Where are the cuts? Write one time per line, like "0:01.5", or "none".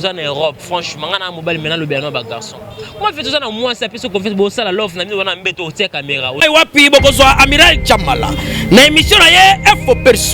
0:06.4